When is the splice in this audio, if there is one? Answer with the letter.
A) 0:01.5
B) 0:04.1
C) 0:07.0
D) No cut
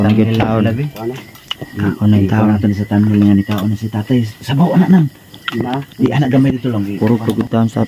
C